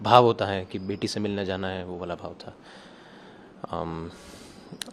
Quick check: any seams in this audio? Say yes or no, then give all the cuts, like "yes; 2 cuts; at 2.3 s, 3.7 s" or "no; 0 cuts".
no; 0 cuts